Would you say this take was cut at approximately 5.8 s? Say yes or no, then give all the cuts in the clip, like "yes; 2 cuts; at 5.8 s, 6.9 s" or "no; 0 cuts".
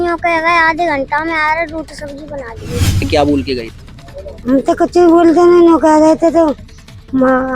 no; 1 cut; at 3.0 s